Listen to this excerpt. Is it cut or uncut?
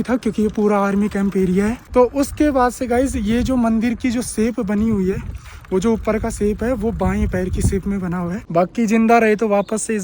cut